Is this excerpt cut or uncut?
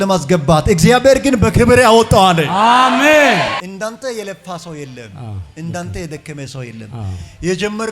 cut